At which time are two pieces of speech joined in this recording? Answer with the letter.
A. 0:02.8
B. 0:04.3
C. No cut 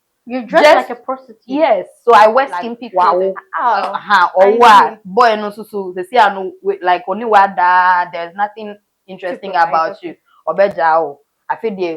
A